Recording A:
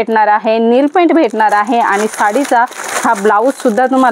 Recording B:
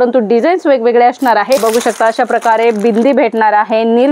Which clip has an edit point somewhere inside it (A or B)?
B